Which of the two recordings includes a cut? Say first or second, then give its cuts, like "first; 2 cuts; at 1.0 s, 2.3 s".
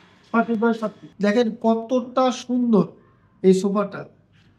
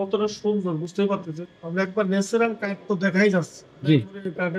first; 1 cut; at 1.0 s